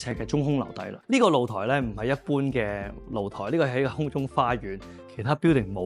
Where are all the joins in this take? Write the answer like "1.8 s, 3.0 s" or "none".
0.9 s, 4.9 s